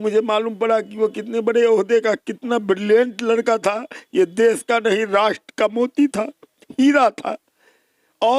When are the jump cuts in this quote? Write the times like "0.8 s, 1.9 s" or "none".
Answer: none